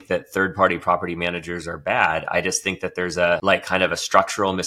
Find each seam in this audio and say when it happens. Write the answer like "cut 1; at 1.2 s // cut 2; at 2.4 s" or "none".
cut 1; at 3.4 s